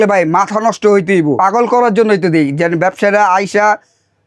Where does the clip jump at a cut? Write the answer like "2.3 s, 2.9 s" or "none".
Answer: 1.4 s